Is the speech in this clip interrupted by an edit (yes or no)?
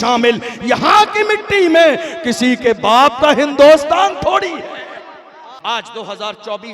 yes